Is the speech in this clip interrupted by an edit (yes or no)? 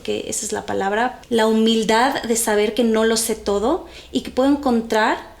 yes